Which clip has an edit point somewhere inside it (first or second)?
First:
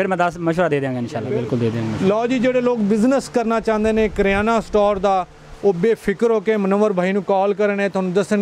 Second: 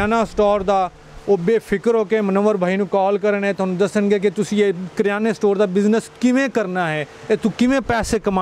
first